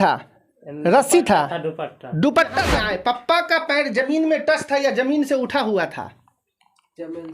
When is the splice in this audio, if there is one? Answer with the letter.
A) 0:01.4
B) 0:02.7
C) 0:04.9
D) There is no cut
B